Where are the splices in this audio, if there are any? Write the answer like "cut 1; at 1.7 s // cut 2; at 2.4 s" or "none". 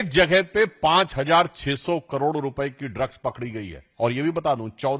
none